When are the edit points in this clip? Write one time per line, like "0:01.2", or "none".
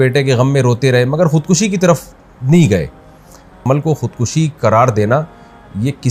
0:03.6

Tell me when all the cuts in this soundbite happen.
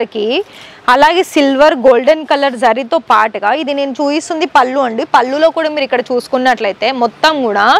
none

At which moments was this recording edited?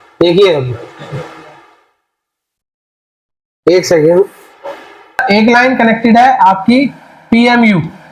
0:05.2

